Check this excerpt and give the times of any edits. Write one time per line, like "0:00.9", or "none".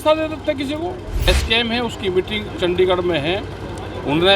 0:01.3